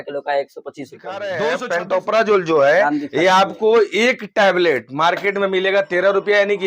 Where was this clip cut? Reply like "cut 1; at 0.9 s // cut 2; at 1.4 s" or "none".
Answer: cut 1; at 1.4 s